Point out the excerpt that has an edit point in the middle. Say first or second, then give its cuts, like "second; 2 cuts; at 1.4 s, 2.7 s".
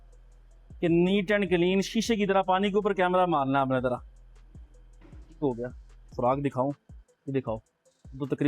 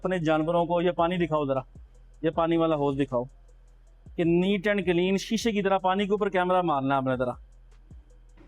first; 1 cut; at 6.1 s